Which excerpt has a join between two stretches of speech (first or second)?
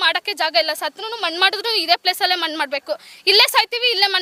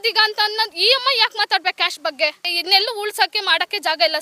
second